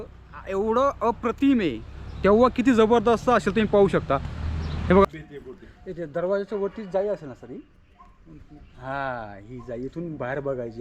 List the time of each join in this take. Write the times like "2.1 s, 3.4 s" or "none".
5.0 s